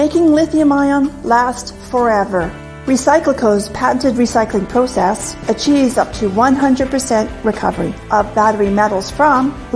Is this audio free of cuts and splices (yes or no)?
no